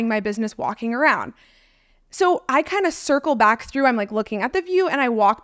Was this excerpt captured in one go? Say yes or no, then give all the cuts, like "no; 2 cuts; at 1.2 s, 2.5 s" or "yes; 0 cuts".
yes; 0 cuts